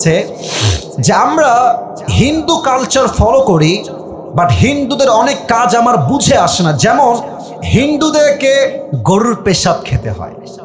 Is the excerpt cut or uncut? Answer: cut